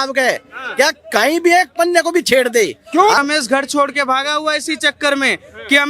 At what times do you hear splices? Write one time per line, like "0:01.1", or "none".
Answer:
0:03.2